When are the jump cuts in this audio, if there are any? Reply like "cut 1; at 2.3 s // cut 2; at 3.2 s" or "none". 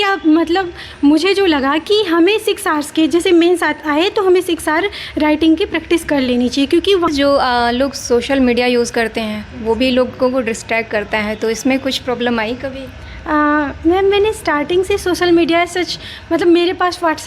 cut 1; at 7.1 s